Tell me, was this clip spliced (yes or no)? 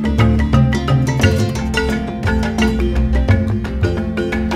no